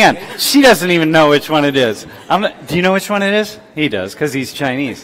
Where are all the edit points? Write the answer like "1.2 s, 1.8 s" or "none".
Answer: none